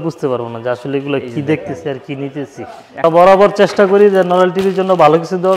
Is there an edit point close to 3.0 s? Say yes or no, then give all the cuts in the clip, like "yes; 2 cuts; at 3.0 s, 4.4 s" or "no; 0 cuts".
yes; 1 cut; at 3.0 s